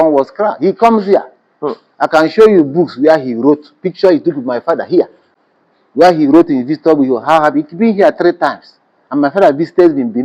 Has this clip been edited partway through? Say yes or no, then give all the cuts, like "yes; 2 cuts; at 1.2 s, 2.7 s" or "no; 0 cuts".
no; 0 cuts